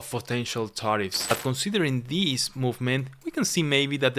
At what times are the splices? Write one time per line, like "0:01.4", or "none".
0:01.2